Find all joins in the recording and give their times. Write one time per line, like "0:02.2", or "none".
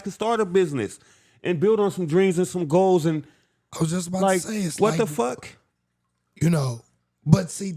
none